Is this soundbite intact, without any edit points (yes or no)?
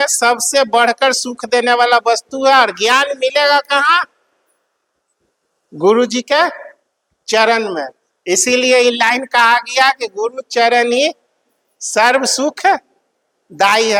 yes